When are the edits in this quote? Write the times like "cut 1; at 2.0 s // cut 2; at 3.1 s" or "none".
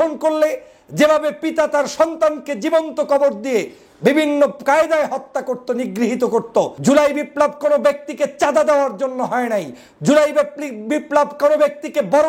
cut 1; at 6.7 s